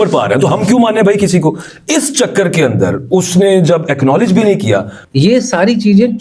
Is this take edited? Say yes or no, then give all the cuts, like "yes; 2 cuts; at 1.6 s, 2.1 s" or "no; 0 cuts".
yes; 1 cut; at 5.0 s